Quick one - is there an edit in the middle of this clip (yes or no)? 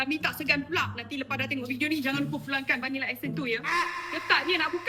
no